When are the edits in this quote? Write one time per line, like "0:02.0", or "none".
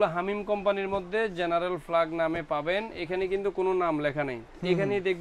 none